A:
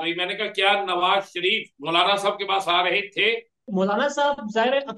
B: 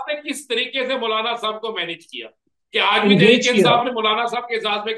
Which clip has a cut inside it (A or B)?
A